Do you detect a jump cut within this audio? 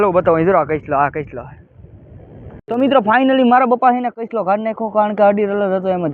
yes; 1 cut; at 2.6 s

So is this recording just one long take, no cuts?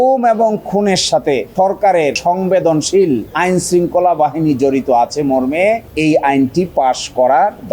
yes; 0 cuts

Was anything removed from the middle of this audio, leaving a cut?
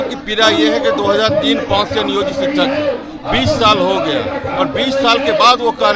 no; 0 cuts

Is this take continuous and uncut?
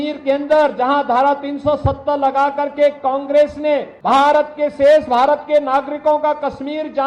no; 1 cut; at 3.9 s

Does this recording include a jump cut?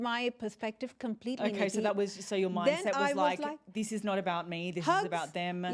no; 0 cuts

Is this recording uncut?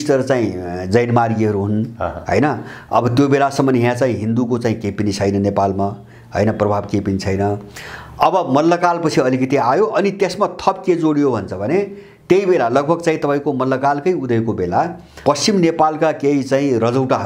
yes; 0 cuts

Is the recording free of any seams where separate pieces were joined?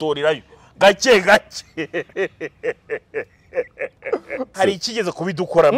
no; 1 cut; at 4.5 s

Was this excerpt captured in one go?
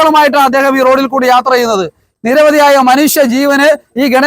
no; 1 cut; at 2.1 s

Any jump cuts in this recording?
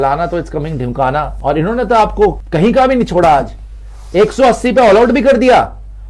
yes; 2 cuts; at 1.3 s, 2.4 s

